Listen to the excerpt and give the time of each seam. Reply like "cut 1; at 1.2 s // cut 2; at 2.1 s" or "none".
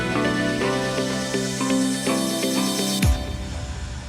cut 1; at 2.0 s